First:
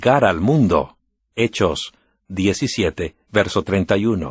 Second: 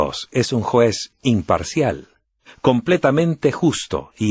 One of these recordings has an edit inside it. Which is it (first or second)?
second